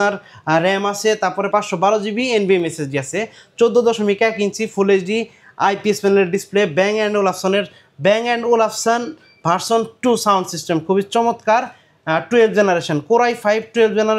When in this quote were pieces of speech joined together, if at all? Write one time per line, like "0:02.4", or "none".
none